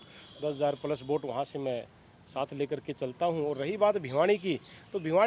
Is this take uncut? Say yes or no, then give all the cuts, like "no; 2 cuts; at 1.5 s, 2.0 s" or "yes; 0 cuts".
yes; 0 cuts